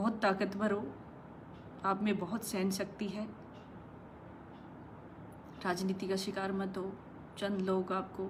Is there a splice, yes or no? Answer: no